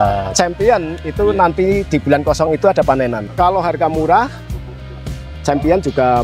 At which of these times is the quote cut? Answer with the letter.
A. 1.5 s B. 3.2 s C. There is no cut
B